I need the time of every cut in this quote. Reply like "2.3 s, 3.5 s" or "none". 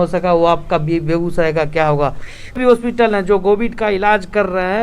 2.6 s